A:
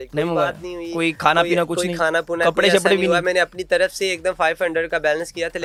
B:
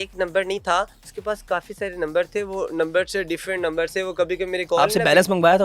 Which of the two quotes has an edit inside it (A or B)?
B